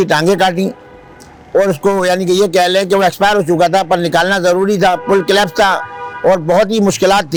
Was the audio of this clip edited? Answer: no; 0 cuts

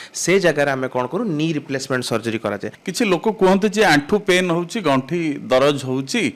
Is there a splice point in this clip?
yes; 1 cut; at 2.7 s

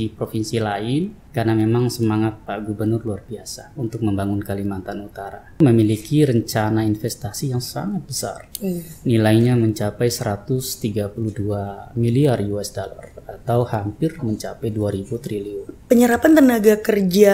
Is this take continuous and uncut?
no; 3 cuts; at 1.2 s, 5.6 s, 15.8 s

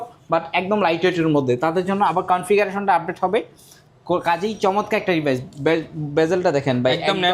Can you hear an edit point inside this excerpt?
no; 0 cuts

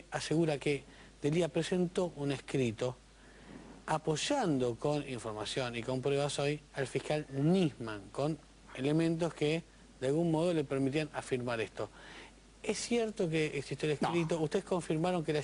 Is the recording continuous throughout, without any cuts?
no; 1 cut; at 1.2 s

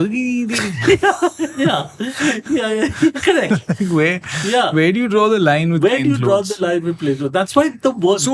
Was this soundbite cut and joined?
no; 0 cuts

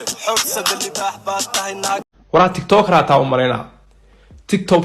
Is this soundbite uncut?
no; 1 cut; at 2.0 s

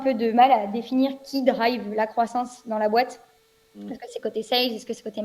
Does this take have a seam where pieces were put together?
no; 0 cuts

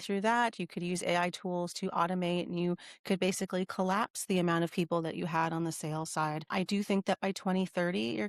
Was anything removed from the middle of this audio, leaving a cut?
no; 0 cuts

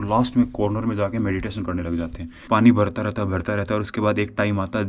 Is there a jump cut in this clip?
no; 0 cuts

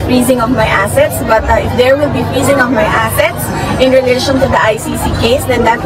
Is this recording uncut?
yes; 0 cuts

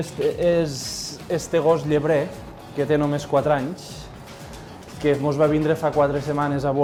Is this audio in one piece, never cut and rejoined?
yes; 0 cuts

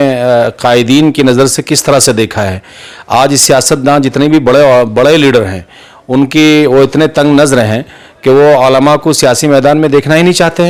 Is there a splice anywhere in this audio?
no; 0 cuts

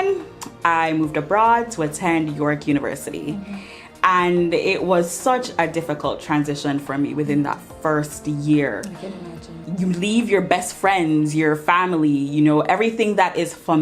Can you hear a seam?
yes; 1 cut; at 9.6 s

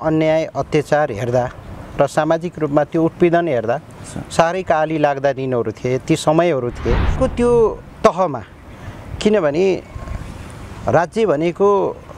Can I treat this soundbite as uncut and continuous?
no; 1 cut; at 7.1 s

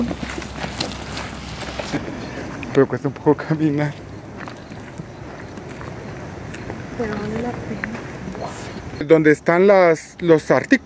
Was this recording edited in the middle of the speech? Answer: yes; 2 cuts; at 2.0 s, 9.0 s

